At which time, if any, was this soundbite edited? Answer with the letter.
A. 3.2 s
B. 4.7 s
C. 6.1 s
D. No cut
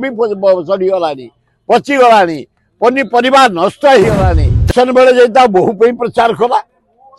B